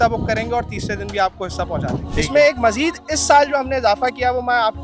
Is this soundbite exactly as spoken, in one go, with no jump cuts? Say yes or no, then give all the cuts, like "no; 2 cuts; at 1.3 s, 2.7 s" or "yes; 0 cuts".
no; 1 cut; at 2.0 s